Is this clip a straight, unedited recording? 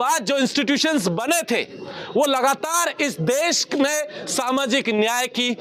yes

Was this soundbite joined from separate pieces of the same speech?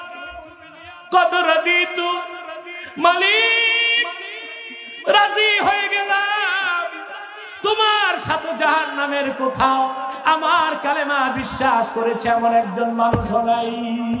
no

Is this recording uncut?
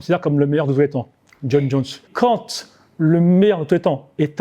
no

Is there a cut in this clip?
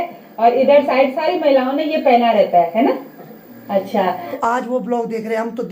yes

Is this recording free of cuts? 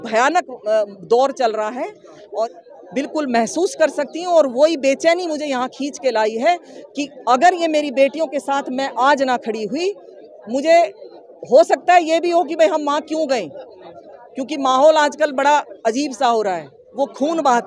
no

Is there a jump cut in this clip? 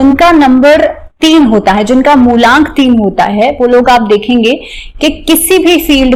no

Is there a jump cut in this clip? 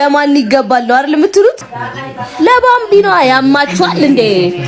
no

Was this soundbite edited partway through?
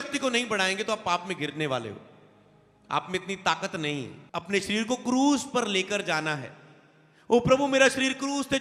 yes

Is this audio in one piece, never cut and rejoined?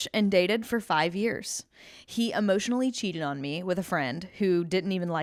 yes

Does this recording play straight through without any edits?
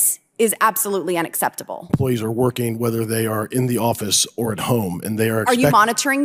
no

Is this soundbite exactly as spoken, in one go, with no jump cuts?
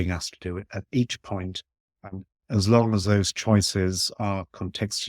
no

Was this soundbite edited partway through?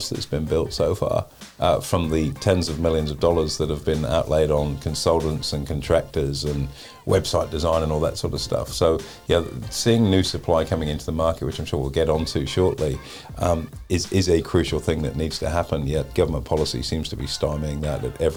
no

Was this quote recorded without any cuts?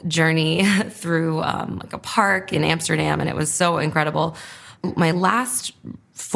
yes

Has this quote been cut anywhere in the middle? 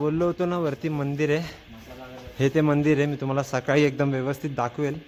no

